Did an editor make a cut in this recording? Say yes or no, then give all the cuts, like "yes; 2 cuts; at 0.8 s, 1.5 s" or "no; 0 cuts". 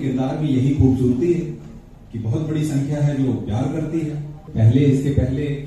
yes; 1 cut; at 4.5 s